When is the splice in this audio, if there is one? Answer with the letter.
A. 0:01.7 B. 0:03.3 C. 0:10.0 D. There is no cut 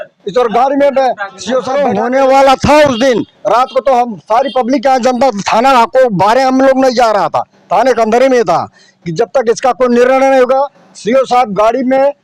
A